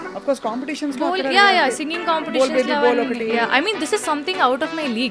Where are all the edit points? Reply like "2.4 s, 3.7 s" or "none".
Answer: none